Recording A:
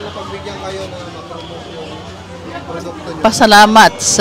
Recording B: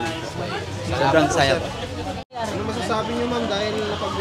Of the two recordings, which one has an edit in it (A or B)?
B